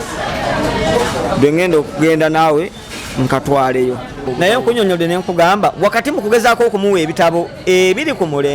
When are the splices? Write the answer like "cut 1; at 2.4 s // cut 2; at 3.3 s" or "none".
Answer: cut 1; at 4.2 s